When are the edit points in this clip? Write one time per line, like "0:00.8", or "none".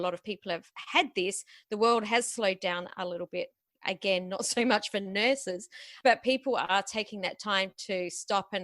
0:05.9